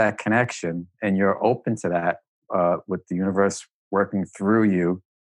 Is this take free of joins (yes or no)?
yes